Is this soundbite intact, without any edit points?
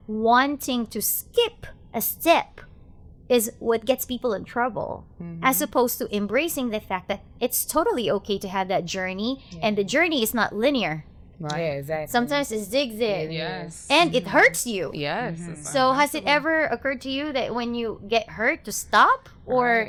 yes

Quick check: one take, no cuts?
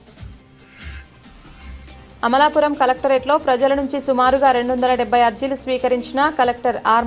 no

